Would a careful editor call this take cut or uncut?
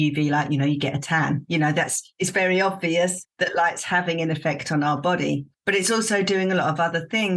cut